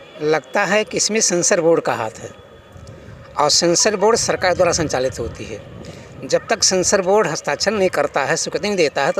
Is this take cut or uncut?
uncut